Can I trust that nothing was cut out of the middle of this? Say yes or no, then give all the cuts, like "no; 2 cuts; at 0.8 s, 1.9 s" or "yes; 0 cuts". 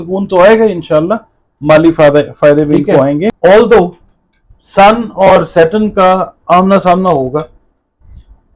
no; 1 cut; at 3.4 s